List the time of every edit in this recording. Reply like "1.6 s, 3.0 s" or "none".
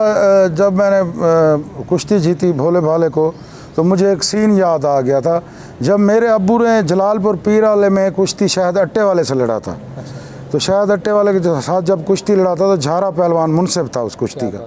none